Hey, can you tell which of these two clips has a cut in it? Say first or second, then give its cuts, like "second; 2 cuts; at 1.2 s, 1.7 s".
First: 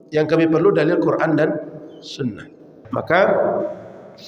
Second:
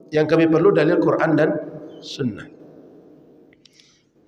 first; 1 cut; at 2.9 s